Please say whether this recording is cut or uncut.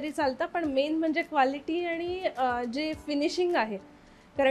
uncut